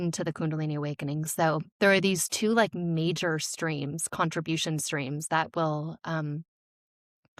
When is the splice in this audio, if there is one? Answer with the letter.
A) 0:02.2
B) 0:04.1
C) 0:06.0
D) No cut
D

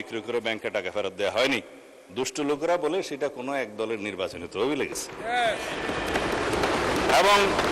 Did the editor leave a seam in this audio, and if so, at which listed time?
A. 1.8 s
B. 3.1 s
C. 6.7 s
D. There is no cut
D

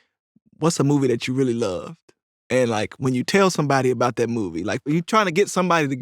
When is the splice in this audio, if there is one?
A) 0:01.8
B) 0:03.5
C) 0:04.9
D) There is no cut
C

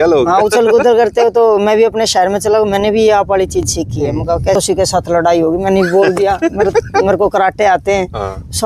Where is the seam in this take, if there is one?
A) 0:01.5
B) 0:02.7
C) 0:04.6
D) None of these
C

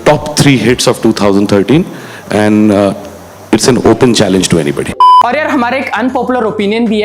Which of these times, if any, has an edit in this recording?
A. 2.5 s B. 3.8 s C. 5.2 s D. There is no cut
C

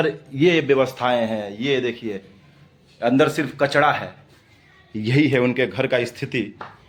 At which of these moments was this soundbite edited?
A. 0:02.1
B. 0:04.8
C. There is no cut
C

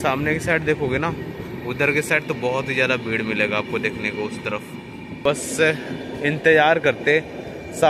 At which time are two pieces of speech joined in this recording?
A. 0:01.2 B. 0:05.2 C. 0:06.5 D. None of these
B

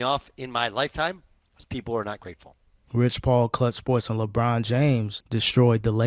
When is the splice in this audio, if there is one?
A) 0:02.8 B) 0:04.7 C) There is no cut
A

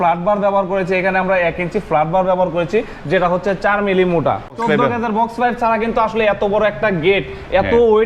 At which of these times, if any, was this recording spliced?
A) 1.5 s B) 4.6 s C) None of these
B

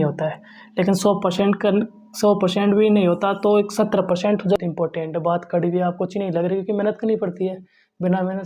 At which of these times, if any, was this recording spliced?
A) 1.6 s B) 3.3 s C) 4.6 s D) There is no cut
C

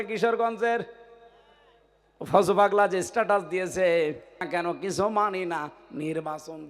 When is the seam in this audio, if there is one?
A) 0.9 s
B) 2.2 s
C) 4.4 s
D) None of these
C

